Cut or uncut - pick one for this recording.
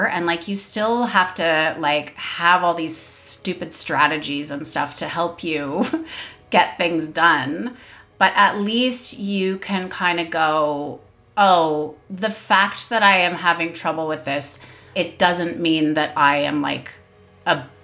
cut